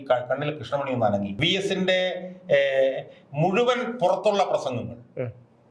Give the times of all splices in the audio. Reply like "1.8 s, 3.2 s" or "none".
1.3 s